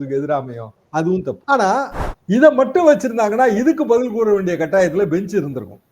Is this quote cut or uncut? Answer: cut